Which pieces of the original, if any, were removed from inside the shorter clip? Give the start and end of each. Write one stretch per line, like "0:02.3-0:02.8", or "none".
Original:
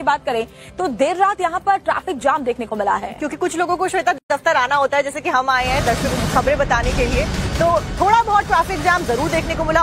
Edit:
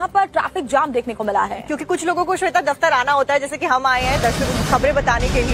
0:04.2-0:04.3